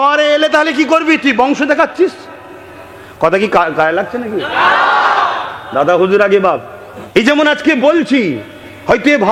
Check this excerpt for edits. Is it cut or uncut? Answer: uncut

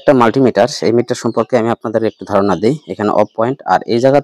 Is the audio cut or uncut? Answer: uncut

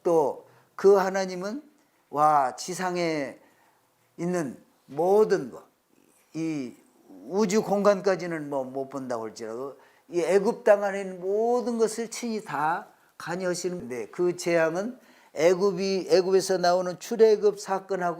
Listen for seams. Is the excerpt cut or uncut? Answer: cut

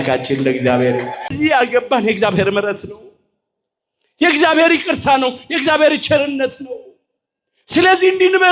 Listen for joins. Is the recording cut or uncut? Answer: cut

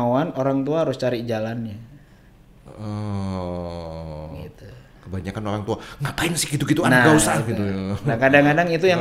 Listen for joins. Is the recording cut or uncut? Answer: uncut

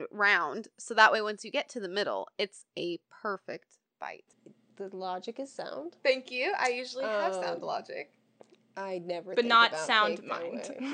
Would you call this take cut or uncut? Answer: cut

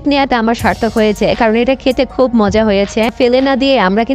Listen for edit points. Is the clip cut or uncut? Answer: cut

